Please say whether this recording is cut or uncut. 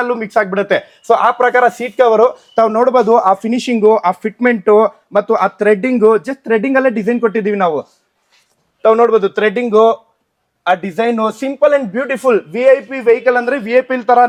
uncut